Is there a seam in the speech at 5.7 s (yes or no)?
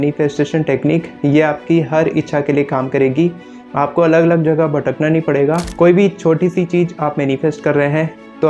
yes